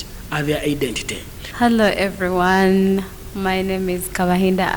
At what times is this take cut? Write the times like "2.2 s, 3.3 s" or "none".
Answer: 1.4 s